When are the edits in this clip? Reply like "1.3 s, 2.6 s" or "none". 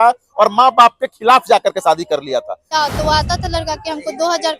2.6 s